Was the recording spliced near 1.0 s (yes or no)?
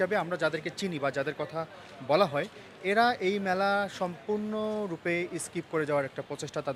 no